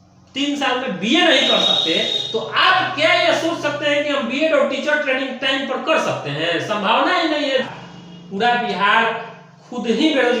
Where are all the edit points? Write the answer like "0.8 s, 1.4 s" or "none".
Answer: 7.6 s